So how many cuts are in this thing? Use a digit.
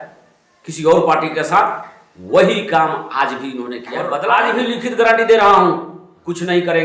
1